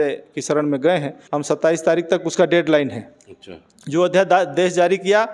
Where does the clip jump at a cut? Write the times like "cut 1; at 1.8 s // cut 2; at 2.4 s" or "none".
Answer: cut 1; at 1.2 s